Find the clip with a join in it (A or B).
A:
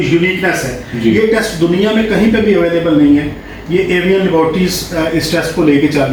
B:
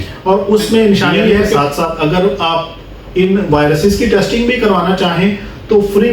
B